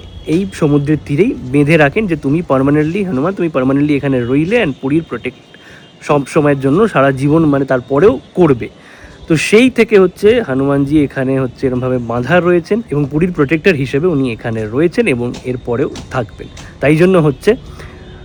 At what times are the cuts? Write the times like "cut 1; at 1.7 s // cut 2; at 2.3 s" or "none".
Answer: none